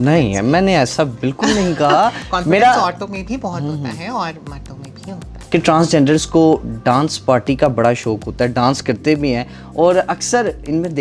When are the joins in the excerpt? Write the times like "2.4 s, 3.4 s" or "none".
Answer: none